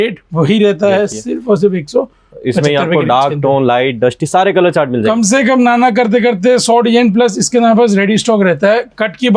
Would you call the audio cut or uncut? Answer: uncut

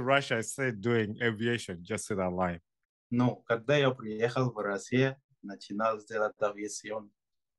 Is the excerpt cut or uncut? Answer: uncut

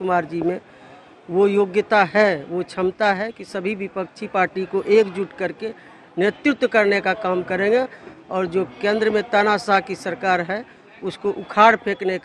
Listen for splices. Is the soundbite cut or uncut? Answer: uncut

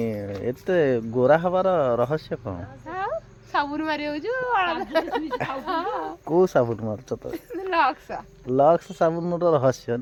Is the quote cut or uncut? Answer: uncut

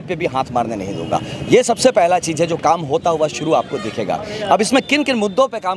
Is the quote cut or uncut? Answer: uncut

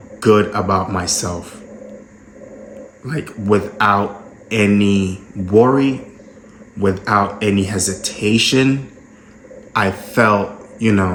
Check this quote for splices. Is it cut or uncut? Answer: uncut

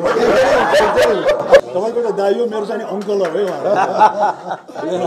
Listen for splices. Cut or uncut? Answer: cut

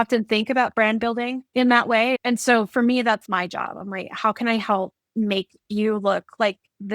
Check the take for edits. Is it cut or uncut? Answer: cut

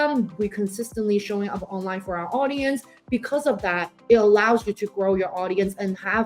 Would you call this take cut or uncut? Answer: cut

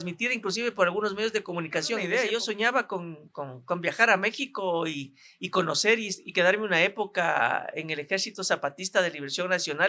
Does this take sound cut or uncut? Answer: cut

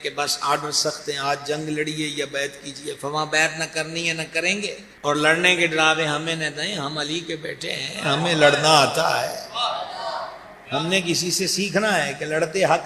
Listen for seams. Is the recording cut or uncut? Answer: cut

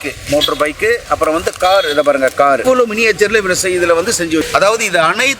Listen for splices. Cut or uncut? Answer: uncut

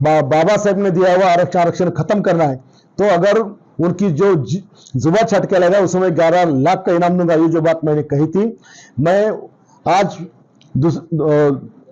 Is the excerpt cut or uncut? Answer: uncut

